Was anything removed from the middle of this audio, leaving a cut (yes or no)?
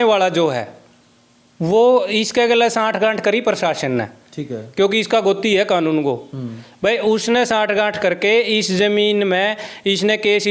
no